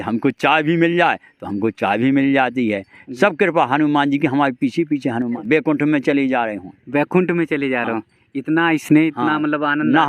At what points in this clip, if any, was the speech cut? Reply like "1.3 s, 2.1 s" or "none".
5.3 s